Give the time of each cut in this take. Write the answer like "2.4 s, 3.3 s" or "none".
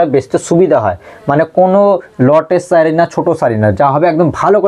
none